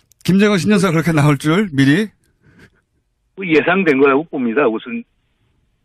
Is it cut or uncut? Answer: uncut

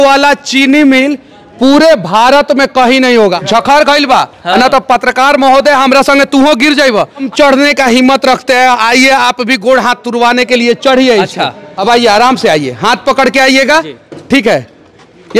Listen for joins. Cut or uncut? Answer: cut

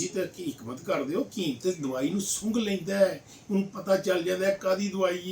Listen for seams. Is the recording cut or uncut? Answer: uncut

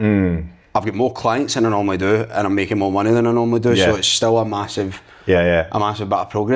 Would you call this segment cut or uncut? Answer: uncut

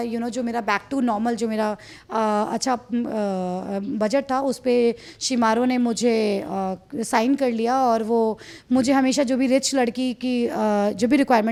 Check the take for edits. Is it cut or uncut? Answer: uncut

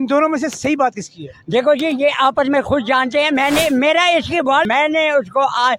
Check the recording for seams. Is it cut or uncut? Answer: cut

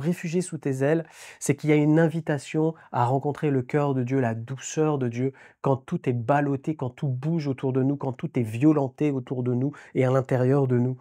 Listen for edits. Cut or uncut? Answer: uncut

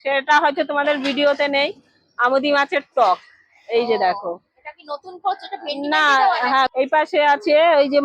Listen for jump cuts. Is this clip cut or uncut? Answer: cut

